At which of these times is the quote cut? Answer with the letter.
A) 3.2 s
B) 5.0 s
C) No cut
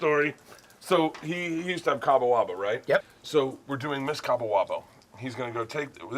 A